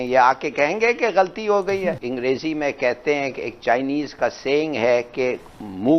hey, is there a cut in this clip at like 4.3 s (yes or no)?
no